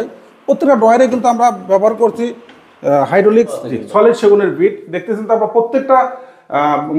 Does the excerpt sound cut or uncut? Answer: cut